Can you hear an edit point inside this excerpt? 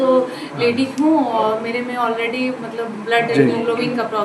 no; 0 cuts

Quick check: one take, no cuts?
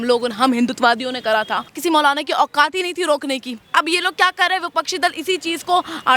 no; 2 cuts; at 1.7 s, 3.6 s

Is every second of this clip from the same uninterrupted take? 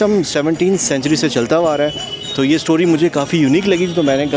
yes; 0 cuts

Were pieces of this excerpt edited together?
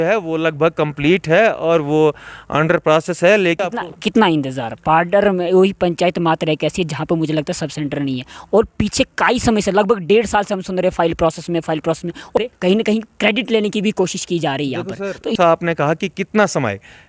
yes; 3 cuts; at 3.6 s, 12.4 s, 15.4 s

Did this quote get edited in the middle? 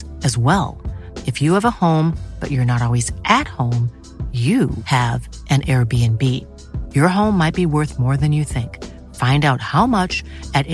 no; 0 cuts

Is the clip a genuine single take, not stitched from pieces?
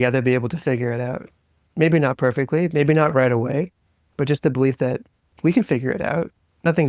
yes; 0 cuts

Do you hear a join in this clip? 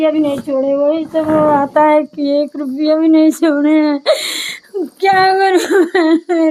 no; 0 cuts

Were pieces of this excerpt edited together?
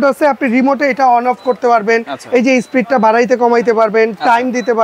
no; 0 cuts

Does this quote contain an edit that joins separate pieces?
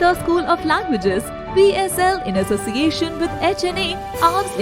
no; 0 cuts

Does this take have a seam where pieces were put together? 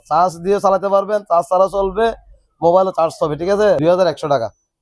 yes; 1 cut; at 3.8 s

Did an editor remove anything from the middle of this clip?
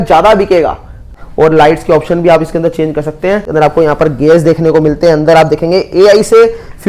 yes; 2 cuts; at 1.1 s, 3.5 s

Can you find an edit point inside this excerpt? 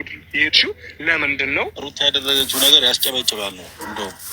yes; 1 cut; at 1.7 s

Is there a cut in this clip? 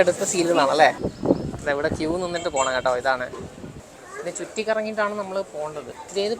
yes; 1 cut; at 1.0 s

